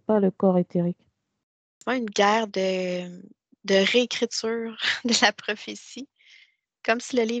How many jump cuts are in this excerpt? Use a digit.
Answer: 1